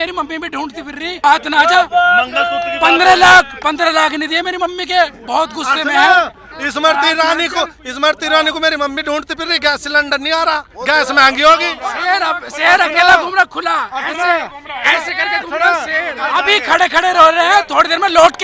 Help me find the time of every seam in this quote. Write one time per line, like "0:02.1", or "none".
0:01.2
0:11.7
0:16.2